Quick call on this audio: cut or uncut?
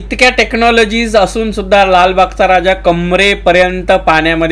uncut